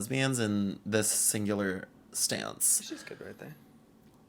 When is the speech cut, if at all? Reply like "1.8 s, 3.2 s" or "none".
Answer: none